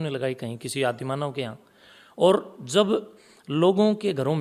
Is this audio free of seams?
yes; 0 cuts

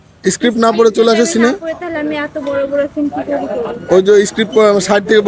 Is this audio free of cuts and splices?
yes; 0 cuts

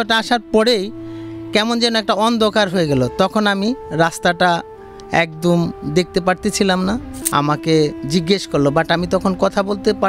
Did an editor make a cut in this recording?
yes; 1 cut; at 7.1 s

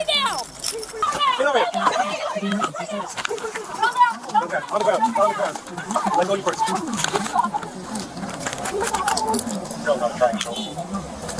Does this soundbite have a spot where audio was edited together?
no; 0 cuts

